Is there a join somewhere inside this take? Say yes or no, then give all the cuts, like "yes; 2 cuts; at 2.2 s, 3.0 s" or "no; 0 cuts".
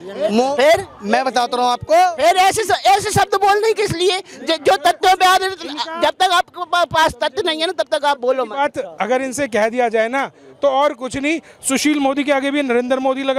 no; 0 cuts